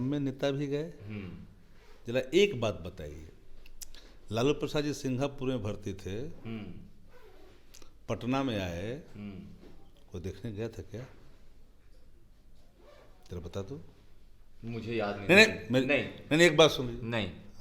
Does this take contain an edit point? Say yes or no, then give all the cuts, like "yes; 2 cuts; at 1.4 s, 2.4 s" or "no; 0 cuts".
no; 0 cuts